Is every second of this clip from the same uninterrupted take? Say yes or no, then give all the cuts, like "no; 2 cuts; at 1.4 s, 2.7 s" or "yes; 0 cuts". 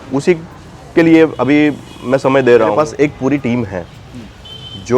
no; 1 cut; at 2.8 s